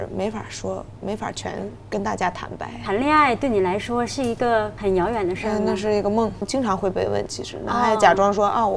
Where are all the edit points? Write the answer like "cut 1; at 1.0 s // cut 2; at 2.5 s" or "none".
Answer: cut 1; at 2.8 s // cut 2; at 4.7 s // cut 3; at 6.5 s